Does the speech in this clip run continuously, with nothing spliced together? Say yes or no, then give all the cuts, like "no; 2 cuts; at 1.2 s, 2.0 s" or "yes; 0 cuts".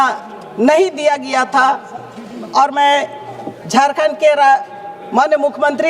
yes; 0 cuts